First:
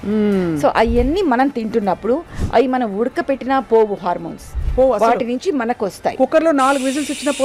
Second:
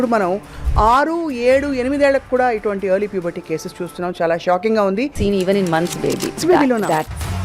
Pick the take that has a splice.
second; 2 cuts; at 5.1 s, 6.4 s

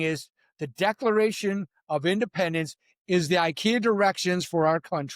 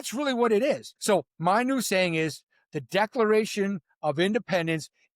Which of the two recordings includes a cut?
second; 1 cut; at 0.9 s

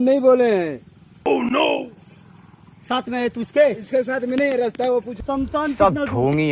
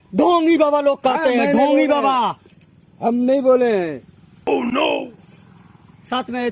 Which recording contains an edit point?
first; 1 cut; at 5.1 s

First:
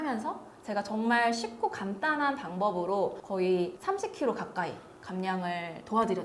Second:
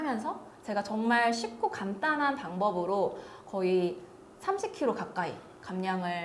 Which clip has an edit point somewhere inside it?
first; 2 cuts; at 3.2 s, 3.8 s

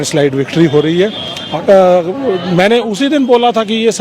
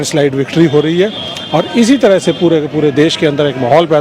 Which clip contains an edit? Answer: first; 1 cut; at 1.5 s

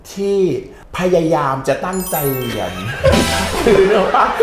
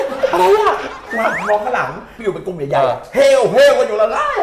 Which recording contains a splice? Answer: second; 2 cuts; at 1.0 s, 2.1 s

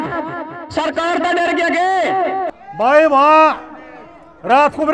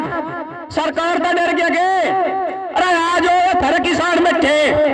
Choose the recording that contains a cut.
first; 1 cut; at 2.6 s

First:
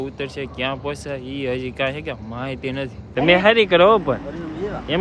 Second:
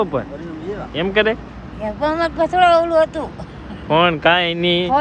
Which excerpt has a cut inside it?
first; 1 cut; at 3.0 s

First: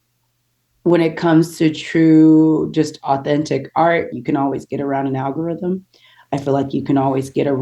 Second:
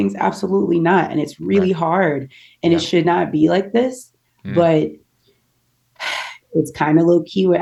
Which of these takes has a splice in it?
first; 1 cut; at 4.1 s

